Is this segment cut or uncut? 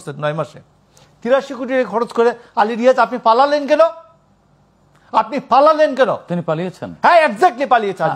uncut